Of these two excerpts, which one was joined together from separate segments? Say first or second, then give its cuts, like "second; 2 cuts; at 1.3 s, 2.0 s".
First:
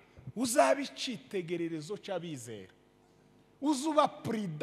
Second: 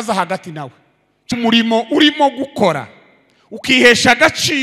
second; 1 cut; at 1.2 s